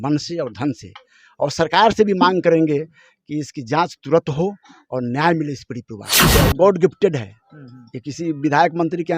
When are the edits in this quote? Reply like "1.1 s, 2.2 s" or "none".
6.3 s